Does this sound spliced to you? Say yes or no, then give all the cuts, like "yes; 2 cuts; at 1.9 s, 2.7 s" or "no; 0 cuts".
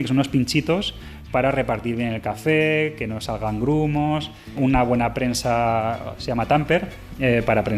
yes; 1 cut; at 4.5 s